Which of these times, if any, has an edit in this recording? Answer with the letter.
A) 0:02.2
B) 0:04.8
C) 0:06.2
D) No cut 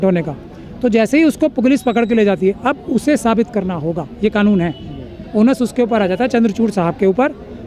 D